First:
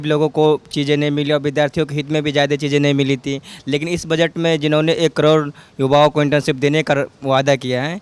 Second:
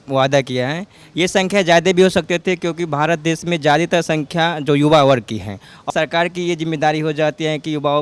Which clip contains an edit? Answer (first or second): second